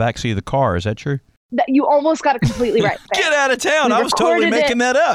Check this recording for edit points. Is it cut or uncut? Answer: cut